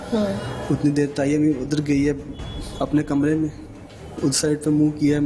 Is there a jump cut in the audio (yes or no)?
no